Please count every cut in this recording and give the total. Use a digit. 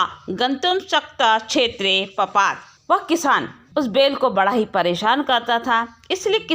2